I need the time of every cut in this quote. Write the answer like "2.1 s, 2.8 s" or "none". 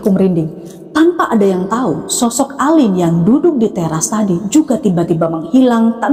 none